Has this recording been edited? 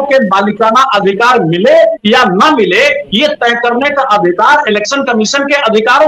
no; 0 cuts

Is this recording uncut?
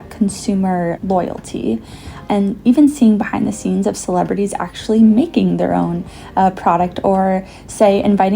no; 2 cuts; at 1.0 s, 2.1 s

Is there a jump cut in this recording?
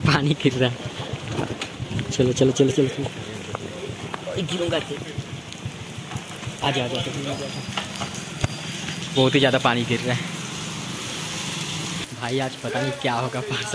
no; 0 cuts

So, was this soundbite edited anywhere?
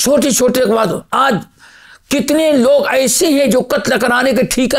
no; 0 cuts

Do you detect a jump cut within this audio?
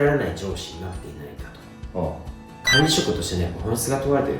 yes; 1 cut; at 2.4 s

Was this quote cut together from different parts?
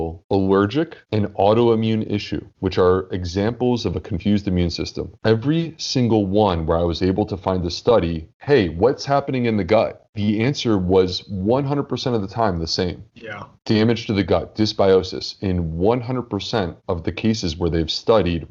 no; 0 cuts

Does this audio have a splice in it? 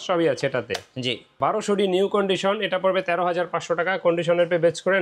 yes; 1 cut; at 1.3 s

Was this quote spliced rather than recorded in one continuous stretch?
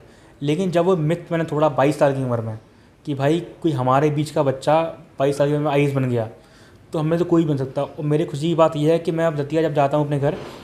no; 0 cuts

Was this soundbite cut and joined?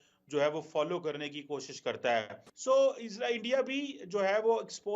yes; 1 cut; at 2.4 s

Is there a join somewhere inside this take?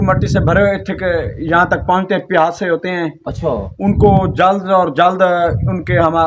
no; 0 cuts

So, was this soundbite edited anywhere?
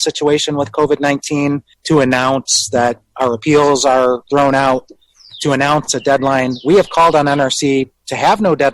yes; 2 cuts; at 1.7 s, 4.2 s

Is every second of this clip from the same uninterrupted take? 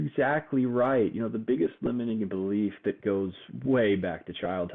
yes; 0 cuts

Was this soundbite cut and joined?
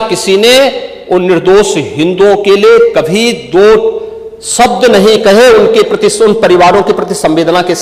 no; 0 cuts

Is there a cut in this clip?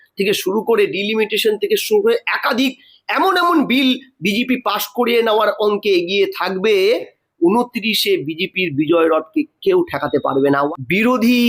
yes; 2 cuts; at 7.2 s, 10.7 s

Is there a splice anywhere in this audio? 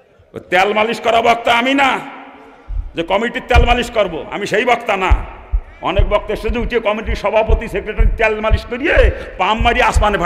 no; 0 cuts

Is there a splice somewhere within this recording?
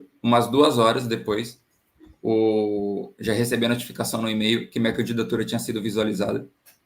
no; 0 cuts

